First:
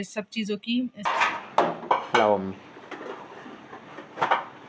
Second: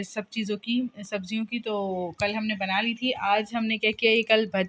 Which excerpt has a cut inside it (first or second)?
first